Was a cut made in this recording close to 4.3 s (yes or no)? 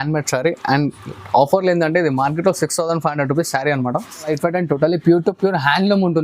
yes